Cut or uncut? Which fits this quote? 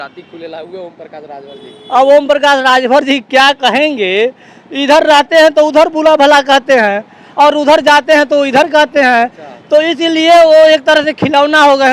uncut